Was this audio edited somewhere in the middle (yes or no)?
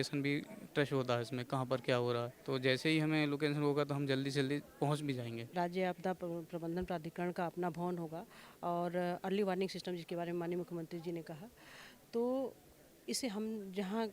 yes